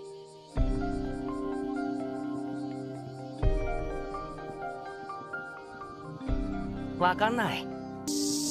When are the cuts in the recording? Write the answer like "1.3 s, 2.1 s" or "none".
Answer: 2.3 s